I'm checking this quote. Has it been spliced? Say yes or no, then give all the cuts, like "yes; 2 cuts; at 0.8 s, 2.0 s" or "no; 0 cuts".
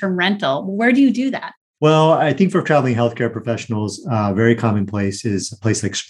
no; 0 cuts